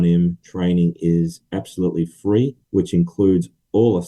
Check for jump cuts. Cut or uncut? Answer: cut